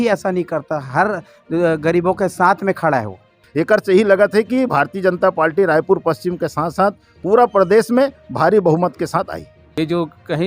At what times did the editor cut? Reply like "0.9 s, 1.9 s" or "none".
3.4 s, 9.6 s